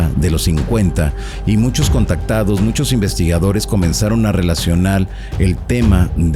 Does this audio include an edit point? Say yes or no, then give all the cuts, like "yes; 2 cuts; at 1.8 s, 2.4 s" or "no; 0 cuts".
no; 0 cuts